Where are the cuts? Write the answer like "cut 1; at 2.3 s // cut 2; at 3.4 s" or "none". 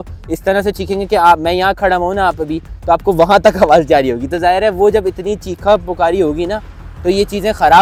none